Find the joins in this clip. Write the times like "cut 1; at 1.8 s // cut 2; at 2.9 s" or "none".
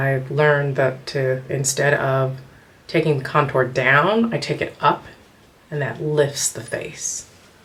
none